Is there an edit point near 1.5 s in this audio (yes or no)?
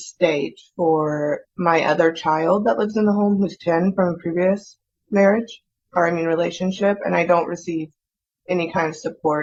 no